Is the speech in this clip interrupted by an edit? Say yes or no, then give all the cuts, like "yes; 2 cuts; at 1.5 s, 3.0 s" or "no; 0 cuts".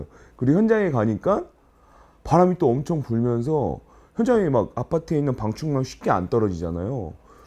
no; 0 cuts